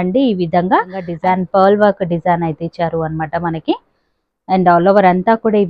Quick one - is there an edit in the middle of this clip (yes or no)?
yes